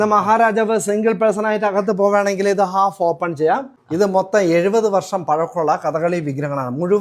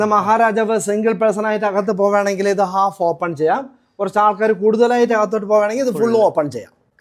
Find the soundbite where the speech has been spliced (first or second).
first